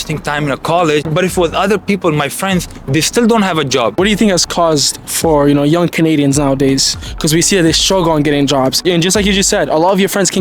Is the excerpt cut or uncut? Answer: cut